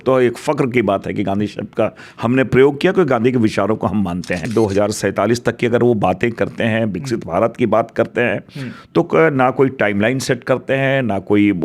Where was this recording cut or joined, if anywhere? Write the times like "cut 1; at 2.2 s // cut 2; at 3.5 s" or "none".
cut 1; at 4.5 s